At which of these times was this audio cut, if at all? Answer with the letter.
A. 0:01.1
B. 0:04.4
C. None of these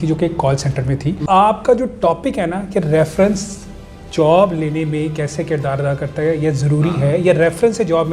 A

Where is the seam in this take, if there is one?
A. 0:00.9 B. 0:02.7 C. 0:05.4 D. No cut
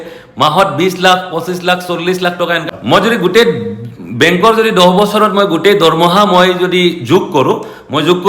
B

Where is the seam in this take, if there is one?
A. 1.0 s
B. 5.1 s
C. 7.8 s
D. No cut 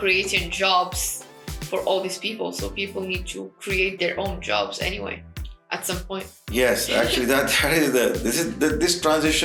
D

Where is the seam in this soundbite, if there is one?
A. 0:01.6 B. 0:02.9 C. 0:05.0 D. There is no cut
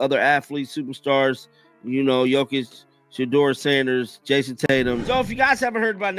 C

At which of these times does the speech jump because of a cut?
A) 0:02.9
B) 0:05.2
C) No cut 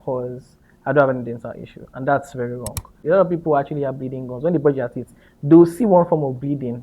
A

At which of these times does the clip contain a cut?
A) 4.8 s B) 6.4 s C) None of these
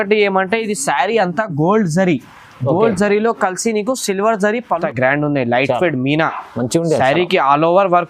A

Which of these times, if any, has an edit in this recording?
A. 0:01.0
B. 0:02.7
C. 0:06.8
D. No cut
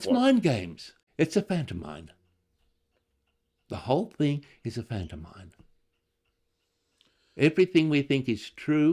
A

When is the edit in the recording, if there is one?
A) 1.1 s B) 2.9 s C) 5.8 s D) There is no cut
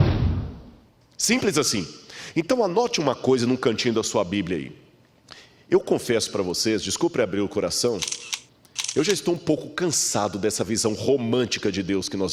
D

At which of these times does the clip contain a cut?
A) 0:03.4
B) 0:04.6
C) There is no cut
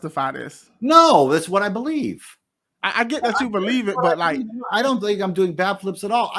C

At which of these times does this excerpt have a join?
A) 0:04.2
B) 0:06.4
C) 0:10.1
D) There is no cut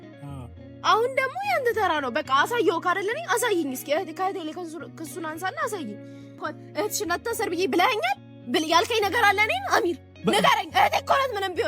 B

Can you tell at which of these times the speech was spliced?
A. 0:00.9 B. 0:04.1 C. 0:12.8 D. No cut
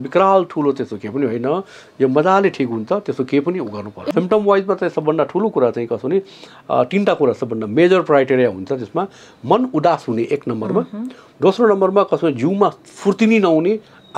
B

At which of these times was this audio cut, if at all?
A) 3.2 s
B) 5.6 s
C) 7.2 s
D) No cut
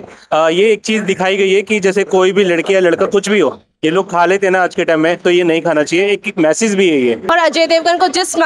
C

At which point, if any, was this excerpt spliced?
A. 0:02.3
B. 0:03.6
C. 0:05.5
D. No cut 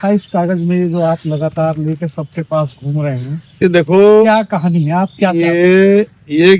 D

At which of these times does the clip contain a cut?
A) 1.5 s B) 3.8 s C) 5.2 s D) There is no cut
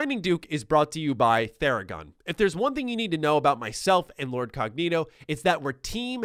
D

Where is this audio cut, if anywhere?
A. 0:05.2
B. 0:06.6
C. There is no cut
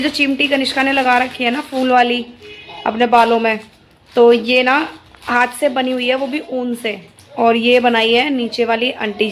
C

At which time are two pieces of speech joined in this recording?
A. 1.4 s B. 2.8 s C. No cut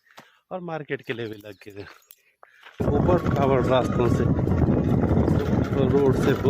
B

